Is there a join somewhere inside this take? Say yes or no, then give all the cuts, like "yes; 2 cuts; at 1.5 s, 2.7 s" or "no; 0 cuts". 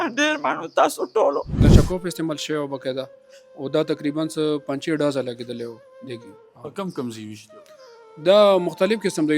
yes; 1 cut; at 1.5 s